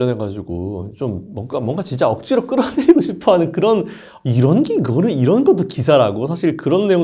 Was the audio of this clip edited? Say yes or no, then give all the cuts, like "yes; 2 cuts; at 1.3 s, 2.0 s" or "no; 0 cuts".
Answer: no; 0 cuts